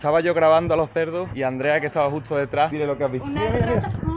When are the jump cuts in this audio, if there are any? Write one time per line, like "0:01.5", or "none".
0:01.3
0:02.7